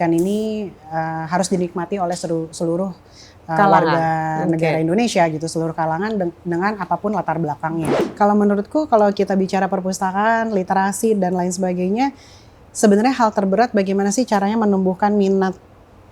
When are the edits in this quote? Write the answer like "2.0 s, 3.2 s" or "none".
7.9 s